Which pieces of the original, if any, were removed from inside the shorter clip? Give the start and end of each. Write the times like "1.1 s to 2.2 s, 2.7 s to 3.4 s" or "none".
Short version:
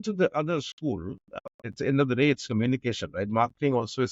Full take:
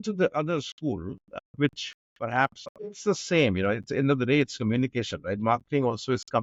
1.6 s to 3.7 s

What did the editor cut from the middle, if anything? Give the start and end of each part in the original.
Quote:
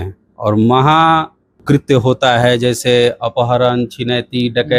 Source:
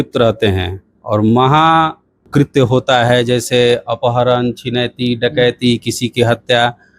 none

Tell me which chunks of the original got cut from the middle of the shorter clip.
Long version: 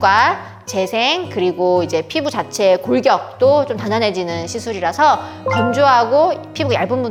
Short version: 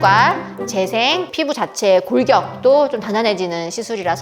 1.3 s to 2.1 s

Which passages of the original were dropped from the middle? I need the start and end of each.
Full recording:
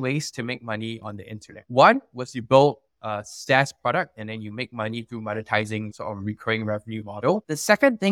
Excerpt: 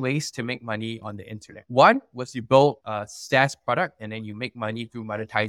2.9 s to 3.1 s

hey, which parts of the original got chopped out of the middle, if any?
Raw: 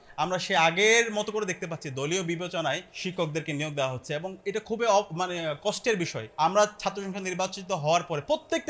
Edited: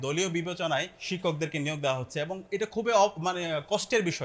none

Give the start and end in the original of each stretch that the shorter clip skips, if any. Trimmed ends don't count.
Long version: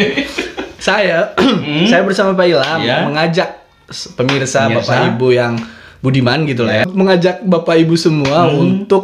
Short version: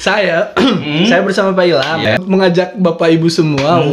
2.8 s to 6.7 s

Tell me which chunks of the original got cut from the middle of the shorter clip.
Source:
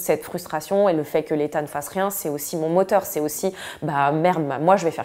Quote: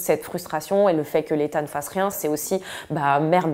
2.2 s to 3.1 s

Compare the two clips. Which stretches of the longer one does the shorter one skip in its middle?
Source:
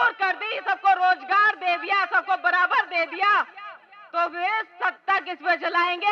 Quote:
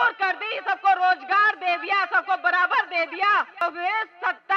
3.6 s to 4.2 s

